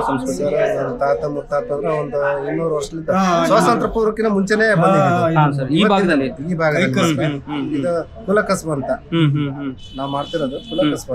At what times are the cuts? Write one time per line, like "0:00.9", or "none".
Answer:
none